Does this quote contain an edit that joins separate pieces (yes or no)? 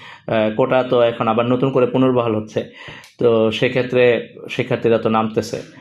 no